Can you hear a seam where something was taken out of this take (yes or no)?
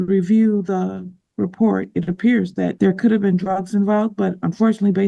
yes